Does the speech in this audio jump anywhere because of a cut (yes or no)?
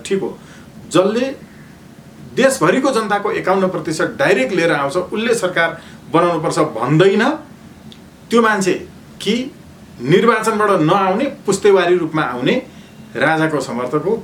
no